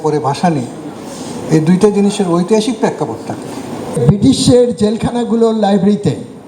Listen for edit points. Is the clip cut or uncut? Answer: cut